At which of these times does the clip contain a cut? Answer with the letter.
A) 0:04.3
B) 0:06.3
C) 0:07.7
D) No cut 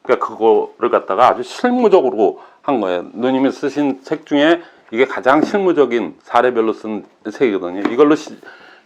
D